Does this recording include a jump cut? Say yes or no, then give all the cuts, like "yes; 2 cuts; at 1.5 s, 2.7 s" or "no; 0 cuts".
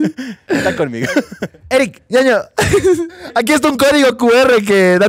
yes; 2 cuts; at 1.5 s, 3.2 s